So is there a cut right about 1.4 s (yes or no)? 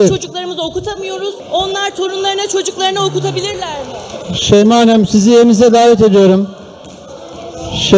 yes